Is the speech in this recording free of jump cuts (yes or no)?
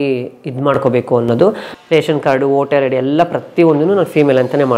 no